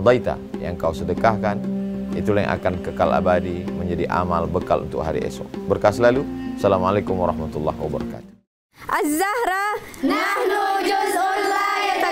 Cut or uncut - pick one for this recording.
uncut